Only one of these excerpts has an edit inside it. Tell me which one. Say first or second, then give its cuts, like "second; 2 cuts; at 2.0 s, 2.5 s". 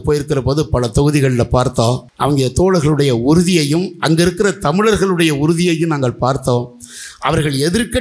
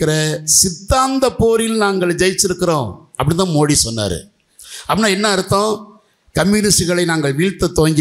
first; 1 cut; at 2.1 s